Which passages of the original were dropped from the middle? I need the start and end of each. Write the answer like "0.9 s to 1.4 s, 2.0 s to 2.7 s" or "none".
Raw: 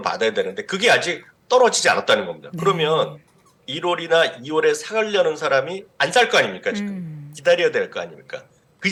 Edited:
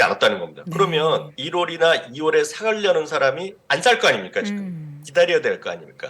3.2 s to 3.7 s